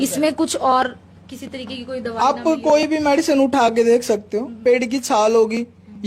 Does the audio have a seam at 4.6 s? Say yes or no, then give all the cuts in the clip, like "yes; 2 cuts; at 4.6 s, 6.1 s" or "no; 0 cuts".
yes; 1 cut; at 4.6 s